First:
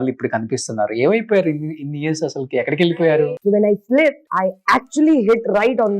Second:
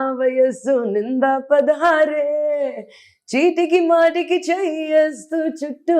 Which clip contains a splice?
first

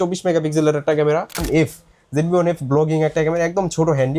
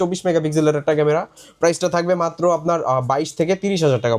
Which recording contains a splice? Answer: first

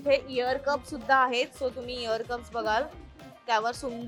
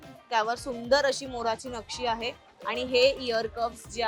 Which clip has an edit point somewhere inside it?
second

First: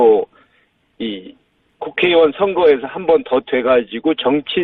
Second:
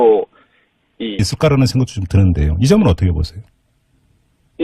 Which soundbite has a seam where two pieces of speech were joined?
first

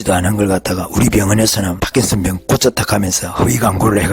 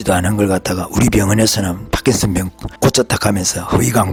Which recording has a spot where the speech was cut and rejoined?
first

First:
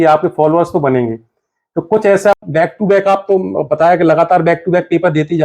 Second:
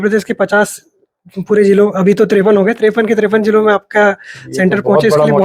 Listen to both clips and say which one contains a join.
first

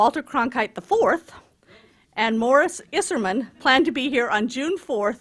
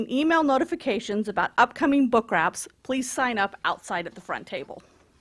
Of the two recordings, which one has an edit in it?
first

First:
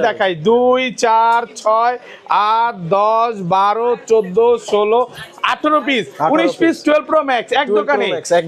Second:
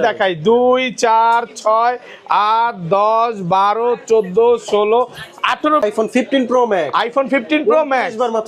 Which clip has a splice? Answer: second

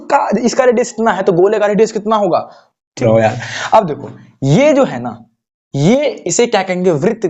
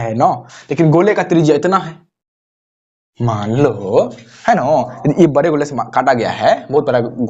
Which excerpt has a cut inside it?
first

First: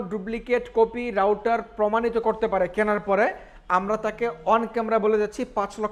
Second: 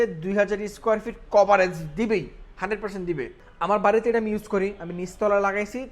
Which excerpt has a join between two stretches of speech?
second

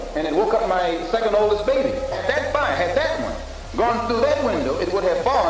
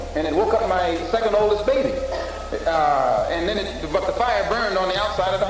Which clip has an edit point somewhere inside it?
first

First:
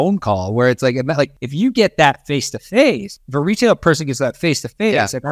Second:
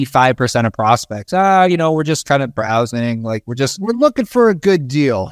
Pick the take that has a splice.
first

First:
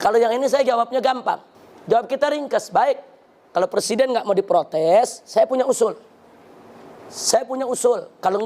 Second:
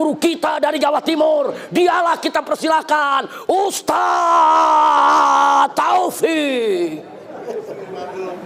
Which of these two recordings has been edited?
first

